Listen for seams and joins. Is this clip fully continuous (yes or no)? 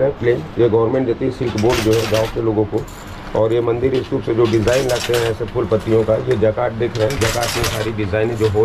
yes